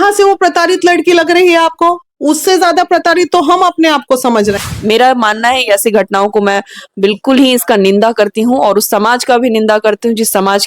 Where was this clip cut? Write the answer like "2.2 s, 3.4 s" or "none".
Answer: 4.6 s